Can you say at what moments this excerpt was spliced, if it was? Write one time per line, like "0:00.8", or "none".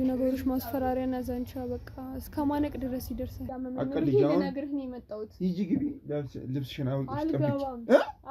0:03.5